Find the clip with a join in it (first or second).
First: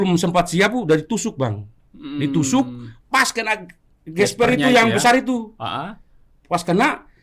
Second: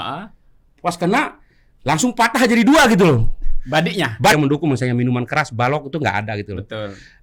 second